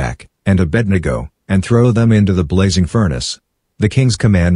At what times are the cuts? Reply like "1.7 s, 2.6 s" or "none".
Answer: none